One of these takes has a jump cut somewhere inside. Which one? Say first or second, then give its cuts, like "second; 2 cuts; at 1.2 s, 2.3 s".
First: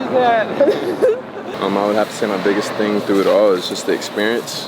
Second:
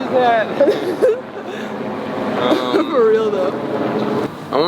first; 1 cut; at 1.5 s